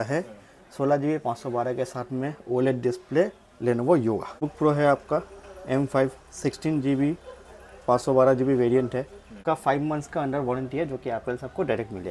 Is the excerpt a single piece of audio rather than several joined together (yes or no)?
no